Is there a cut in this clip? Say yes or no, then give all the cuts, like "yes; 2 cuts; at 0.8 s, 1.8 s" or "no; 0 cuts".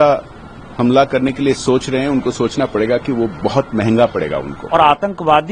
yes; 1 cut; at 4.6 s